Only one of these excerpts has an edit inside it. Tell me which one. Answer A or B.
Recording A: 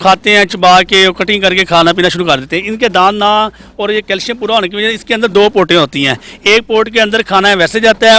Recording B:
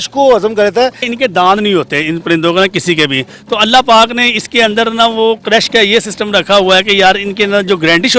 B